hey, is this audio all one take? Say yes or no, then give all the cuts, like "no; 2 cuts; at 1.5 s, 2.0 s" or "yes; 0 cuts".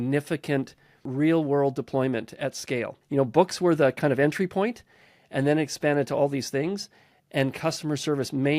no; 1 cut; at 2.9 s